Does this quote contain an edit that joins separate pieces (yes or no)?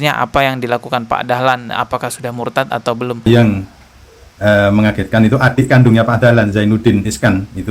yes